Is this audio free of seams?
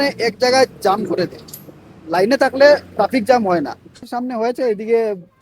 no; 1 cut; at 4.1 s

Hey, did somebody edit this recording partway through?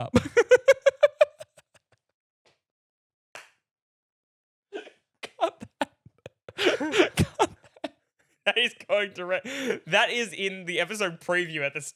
no; 0 cuts

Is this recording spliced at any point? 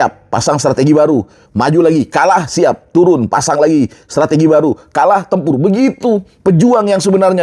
no; 0 cuts

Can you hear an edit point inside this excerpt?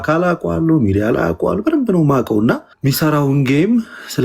yes; 1 cut; at 2.7 s

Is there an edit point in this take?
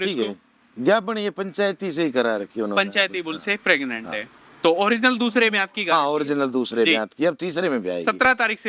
no; 0 cuts

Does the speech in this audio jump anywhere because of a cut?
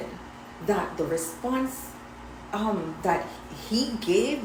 no; 0 cuts

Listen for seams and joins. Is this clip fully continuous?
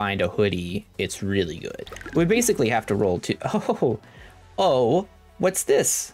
no; 1 cut; at 1.9 s

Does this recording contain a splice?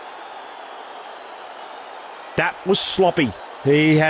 yes; 1 cut; at 2.3 s

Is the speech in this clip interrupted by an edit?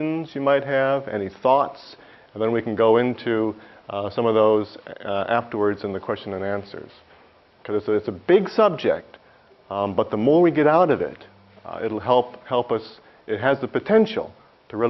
yes; 1 cut; at 9.9 s

